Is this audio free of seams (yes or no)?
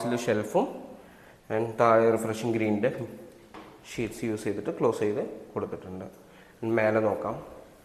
yes